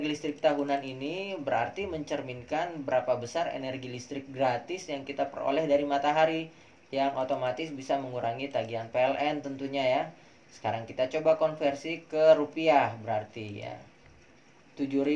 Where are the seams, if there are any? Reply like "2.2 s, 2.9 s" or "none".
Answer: none